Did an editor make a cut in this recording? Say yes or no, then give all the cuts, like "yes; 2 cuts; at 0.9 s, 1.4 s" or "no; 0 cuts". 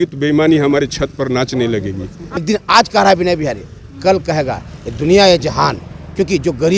yes; 1 cut; at 2.4 s